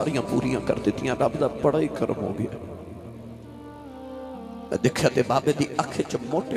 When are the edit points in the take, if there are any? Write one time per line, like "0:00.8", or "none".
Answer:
0:02.6
0:04.4